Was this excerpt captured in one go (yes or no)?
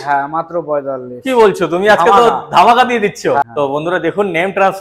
no